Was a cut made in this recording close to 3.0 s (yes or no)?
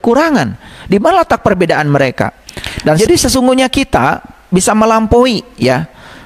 yes